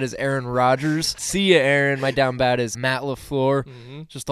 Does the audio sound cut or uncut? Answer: cut